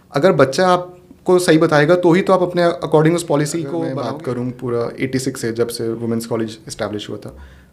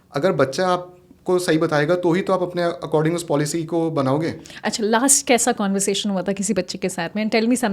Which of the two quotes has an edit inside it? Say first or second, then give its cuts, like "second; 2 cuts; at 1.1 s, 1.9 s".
first; 1 cut; at 3.9 s